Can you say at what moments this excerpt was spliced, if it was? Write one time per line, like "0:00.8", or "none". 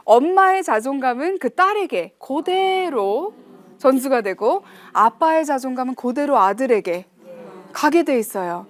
none

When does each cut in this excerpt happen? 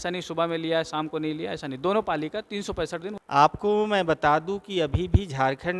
0:03.1

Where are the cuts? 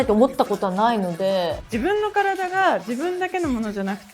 0:01.5

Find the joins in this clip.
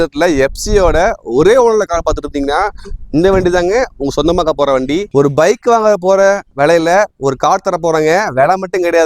0:05.0

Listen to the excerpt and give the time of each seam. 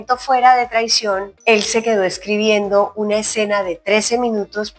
none

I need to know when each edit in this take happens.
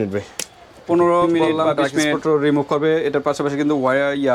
0:02.2

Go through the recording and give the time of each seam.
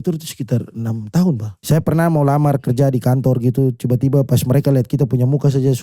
0:01.5

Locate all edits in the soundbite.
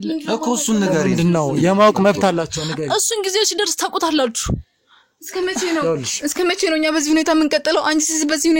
none

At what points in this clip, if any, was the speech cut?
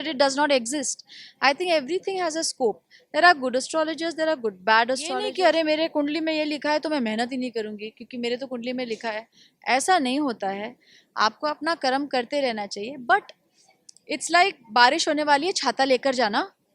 0:05.2

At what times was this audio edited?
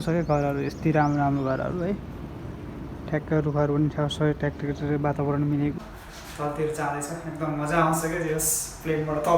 0:05.8

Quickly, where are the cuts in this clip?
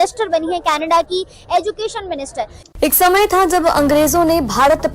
0:02.6

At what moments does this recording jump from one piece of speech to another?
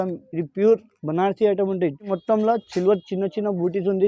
0:02.1

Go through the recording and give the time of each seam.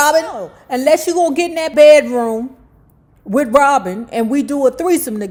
none

